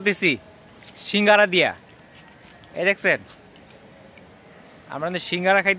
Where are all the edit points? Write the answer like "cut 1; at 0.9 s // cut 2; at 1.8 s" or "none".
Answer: none